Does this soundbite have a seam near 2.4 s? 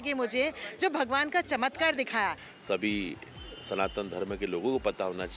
yes; 1 cut; at 2.4 s

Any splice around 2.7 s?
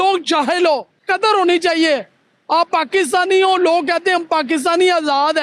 no; 1 cut; at 0.9 s

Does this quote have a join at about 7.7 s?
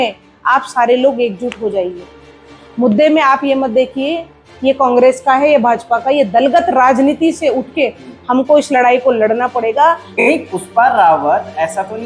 no; 1 cut; at 10.1 s

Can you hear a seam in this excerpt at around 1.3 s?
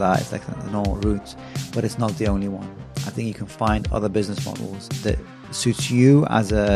no; 1 cut; at 4.9 s

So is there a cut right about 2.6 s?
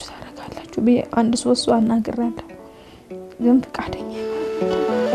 no; 1 cut; at 4.1 s

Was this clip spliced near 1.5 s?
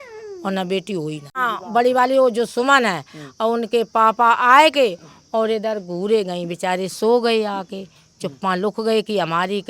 yes; 1 cut; at 1.5 s

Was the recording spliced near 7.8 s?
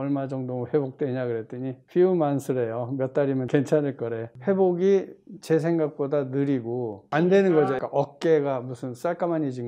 yes; 2 cuts; at 4.3 s, 7.8 s

